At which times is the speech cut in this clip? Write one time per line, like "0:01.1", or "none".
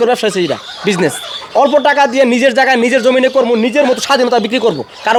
none